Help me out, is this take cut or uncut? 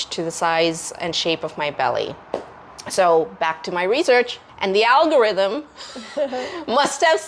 uncut